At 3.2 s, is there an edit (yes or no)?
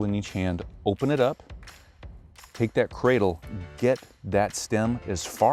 no